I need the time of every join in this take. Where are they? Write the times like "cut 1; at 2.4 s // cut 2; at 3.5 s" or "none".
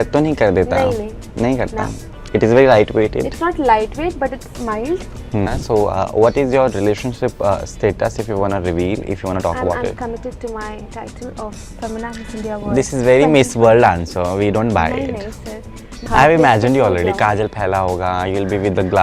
cut 1; at 5.5 s // cut 2; at 16.1 s